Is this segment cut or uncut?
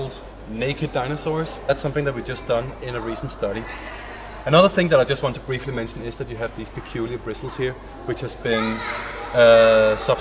uncut